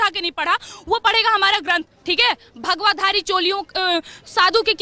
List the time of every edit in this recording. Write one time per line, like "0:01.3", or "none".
0:01.9

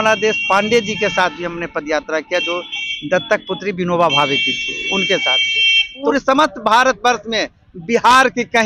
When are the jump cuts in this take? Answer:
0:06.1

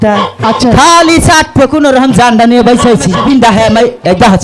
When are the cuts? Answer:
0:03.2

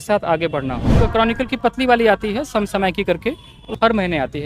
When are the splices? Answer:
0:01.0
0:03.5

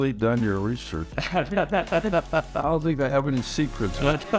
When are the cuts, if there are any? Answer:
none

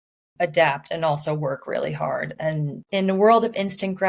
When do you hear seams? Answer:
0:02.8

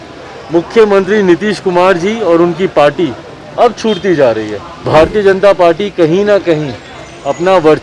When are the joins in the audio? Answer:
0:04.8

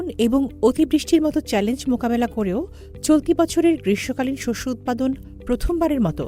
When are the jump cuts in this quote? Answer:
none

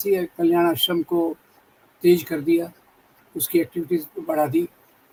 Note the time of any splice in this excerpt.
none

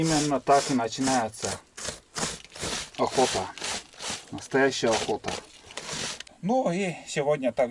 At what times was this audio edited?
0:06.3

